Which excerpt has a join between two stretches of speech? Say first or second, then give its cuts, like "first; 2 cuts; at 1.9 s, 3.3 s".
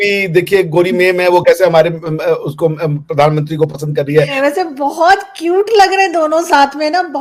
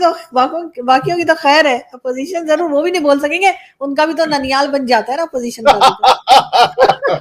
first; 1 cut; at 4.3 s